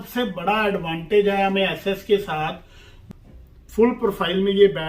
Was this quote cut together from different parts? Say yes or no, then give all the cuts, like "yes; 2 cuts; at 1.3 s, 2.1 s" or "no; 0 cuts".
yes; 1 cut; at 3.0 s